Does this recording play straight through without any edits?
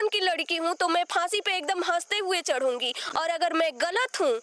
yes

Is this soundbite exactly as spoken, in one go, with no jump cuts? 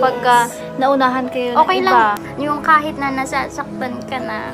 no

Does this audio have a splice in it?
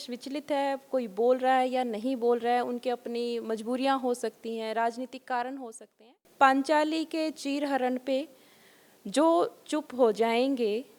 yes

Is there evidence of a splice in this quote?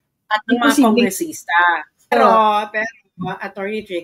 yes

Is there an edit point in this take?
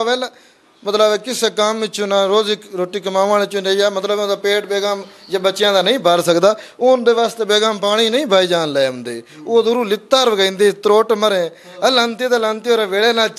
no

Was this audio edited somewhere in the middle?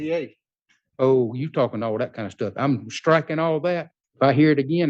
yes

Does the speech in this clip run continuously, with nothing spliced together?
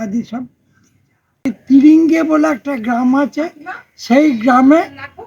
no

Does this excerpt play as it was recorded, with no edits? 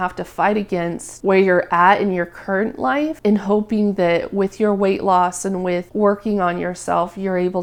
yes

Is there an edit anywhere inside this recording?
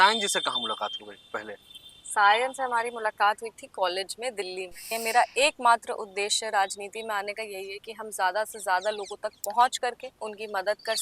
yes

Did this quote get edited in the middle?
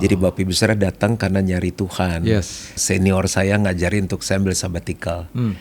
yes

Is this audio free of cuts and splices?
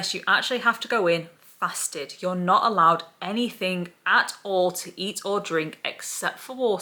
yes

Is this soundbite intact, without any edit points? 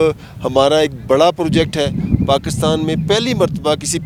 yes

